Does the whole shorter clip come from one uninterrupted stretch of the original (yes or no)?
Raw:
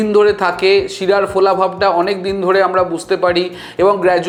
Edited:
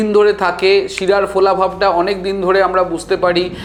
yes